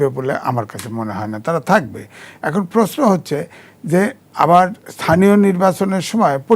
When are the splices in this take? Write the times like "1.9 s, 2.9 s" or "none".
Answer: none